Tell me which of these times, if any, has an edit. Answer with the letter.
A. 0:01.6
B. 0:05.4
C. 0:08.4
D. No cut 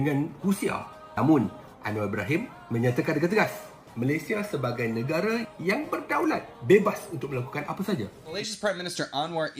C